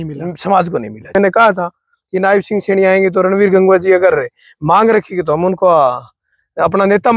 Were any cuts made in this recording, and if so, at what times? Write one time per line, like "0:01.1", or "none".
0:01.1